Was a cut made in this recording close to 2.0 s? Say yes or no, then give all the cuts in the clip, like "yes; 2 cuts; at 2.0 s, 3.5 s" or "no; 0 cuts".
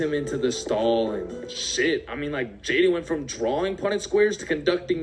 no; 0 cuts